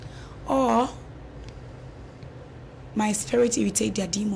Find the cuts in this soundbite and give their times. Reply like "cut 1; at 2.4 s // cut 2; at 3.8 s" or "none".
none